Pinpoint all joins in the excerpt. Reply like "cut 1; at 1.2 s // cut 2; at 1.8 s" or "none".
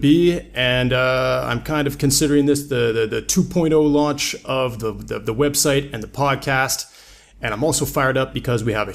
cut 1; at 7.6 s